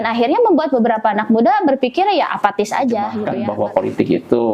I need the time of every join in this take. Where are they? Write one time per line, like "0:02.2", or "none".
0:03.2